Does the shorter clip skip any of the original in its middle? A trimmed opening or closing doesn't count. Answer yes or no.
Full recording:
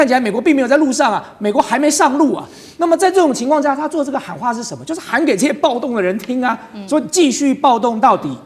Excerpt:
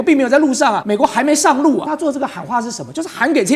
yes